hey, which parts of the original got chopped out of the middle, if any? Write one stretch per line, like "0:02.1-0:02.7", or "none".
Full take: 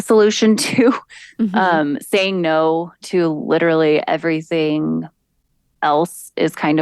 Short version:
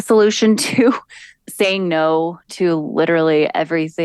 0:01.4-0:01.9